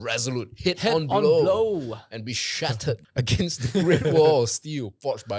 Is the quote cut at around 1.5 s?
no; 1 cut; at 3.1 s

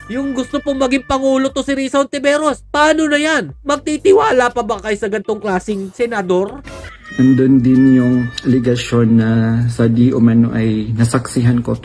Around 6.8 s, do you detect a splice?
no; 0 cuts

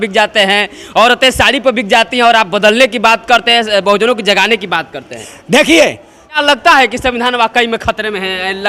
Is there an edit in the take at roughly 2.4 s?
no; 1 cut; at 6.4 s

